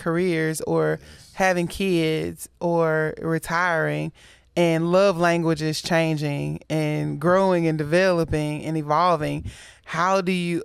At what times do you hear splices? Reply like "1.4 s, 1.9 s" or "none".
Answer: none